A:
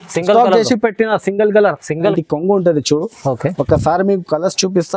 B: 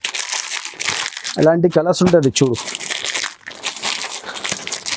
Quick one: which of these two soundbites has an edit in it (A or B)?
A